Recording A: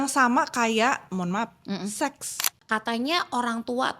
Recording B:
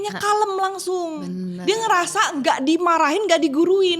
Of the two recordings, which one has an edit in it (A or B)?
A